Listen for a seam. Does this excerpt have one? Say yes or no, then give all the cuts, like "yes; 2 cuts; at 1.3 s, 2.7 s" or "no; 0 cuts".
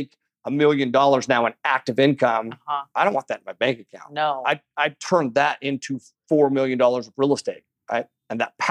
no; 0 cuts